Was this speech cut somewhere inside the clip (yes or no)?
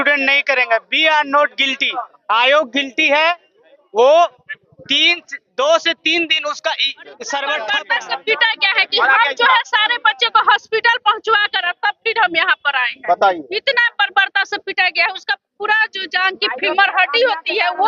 yes